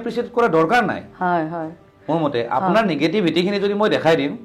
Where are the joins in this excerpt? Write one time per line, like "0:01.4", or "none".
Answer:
none

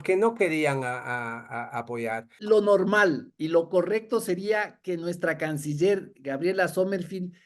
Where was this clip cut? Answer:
0:02.3

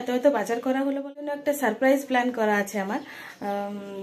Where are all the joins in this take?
0:01.4

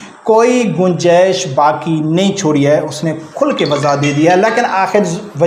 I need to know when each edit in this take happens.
none

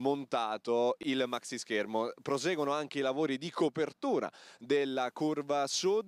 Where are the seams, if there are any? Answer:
0:01.2

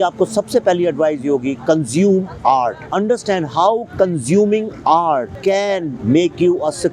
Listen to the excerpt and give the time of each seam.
0:02.8
0:05.3

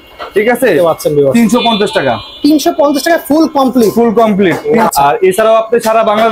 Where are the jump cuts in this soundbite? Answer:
0:04.9

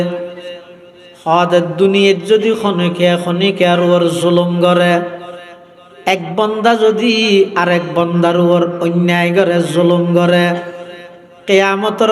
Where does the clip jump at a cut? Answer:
none

